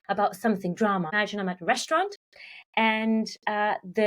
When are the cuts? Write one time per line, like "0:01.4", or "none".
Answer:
0:01.2